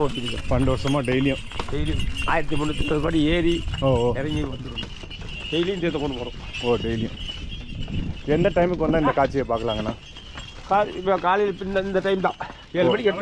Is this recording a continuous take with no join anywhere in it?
yes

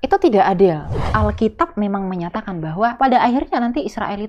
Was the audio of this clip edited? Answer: yes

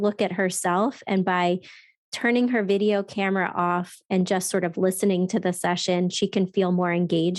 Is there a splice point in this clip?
no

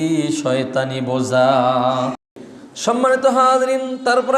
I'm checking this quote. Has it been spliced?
yes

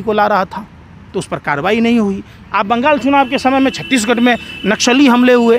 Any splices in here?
no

